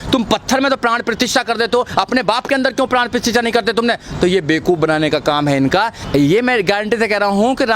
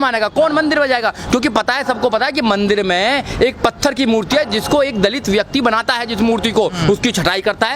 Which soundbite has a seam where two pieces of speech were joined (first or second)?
first